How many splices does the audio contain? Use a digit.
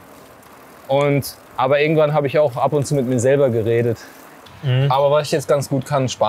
1